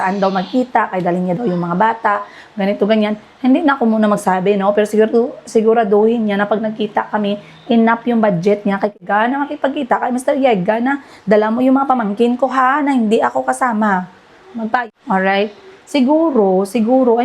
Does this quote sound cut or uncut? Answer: cut